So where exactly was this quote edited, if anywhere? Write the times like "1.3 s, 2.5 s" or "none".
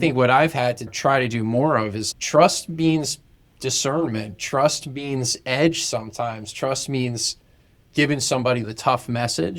0.9 s, 2.0 s, 8.7 s